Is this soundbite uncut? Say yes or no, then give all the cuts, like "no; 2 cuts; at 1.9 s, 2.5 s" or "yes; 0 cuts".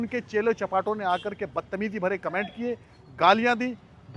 yes; 0 cuts